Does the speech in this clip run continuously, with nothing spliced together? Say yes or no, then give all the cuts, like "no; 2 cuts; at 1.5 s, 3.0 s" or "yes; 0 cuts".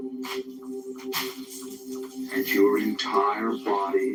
yes; 0 cuts